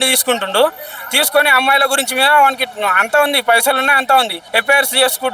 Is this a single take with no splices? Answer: no; 1 cut; at 4.4 s

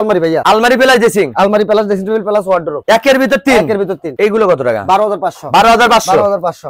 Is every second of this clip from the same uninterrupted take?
yes; 0 cuts

